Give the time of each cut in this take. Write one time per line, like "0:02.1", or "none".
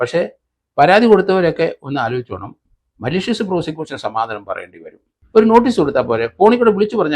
0:05.1